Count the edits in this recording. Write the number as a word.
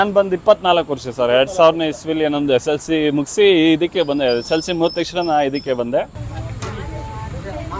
one